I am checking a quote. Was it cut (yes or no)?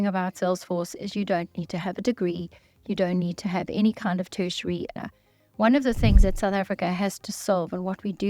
yes